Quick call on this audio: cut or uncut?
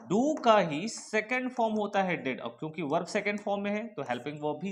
uncut